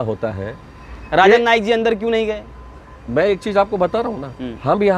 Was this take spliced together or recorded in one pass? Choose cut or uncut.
uncut